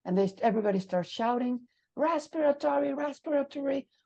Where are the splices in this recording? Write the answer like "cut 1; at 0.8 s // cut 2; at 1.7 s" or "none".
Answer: none